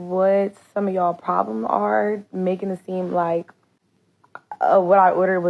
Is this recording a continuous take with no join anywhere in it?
yes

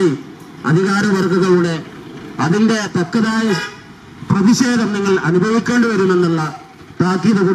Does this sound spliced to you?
no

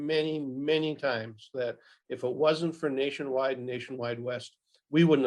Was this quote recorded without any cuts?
yes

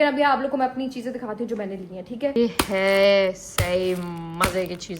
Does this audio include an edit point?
yes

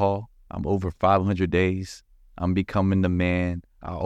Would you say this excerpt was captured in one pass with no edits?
yes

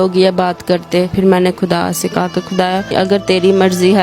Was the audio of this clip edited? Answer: yes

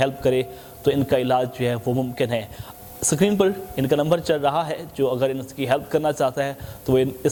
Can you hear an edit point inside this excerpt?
no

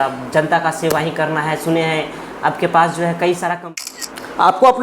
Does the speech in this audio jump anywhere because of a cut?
yes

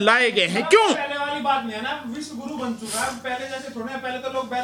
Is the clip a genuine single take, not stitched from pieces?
yes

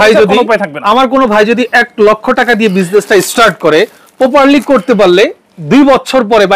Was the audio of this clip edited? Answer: no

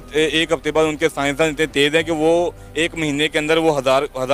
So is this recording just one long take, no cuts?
yes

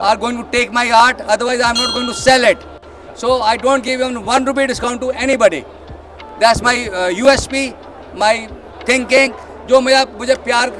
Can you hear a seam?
no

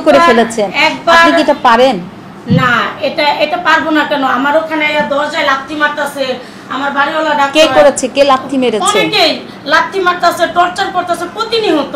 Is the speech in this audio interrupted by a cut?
no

